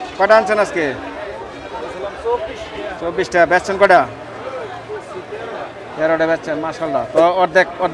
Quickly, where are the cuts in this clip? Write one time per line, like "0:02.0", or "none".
none